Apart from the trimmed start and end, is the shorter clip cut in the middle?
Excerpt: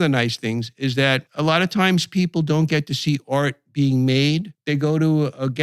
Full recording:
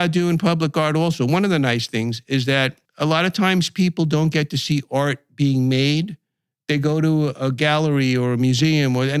yes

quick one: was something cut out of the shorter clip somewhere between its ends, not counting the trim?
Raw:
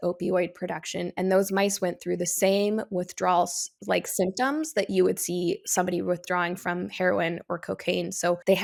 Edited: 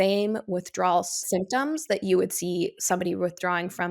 yes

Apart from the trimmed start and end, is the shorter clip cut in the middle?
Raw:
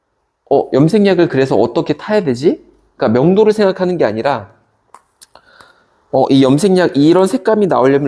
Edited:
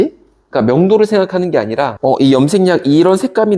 yes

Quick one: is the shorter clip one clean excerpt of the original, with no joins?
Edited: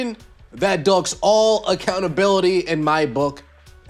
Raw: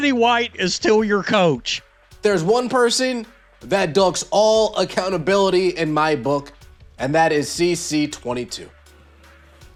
yes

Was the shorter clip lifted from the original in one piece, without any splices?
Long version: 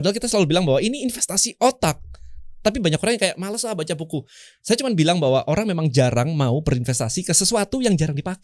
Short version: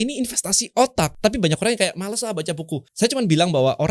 no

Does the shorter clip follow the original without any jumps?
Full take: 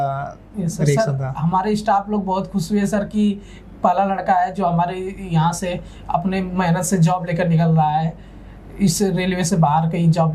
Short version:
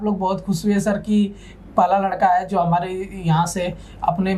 yes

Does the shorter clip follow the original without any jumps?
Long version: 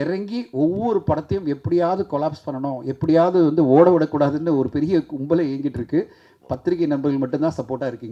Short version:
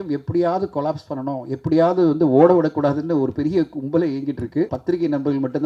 no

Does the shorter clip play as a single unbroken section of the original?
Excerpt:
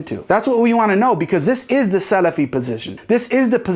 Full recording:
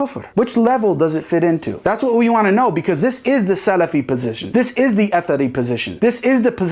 no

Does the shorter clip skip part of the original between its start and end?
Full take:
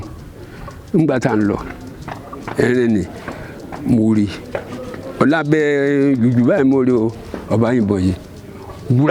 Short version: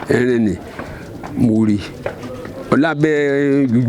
no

